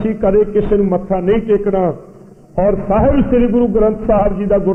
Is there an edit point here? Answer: no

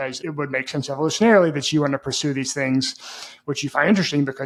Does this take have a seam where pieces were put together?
no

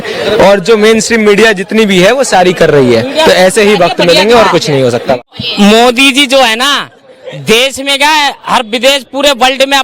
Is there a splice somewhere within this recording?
yes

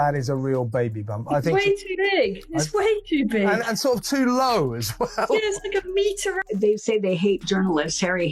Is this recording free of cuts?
no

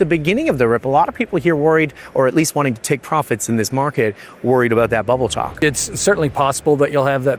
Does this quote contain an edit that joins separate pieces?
yes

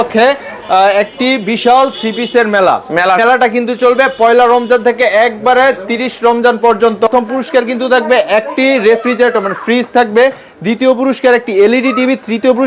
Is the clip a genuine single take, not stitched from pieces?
no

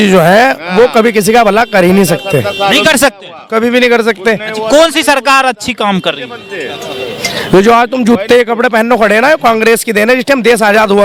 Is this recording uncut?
yes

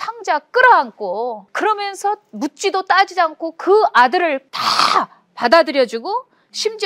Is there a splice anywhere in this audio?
yes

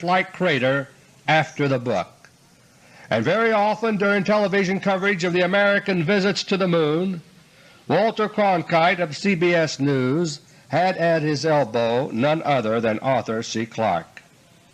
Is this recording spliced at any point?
yes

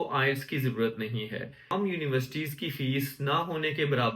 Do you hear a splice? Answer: yes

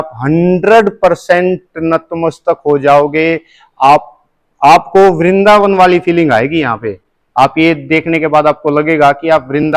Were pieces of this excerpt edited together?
no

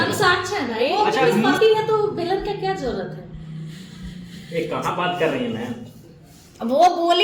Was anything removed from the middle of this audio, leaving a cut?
yes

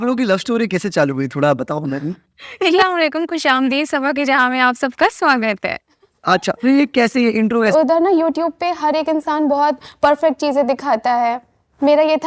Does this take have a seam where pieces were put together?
yes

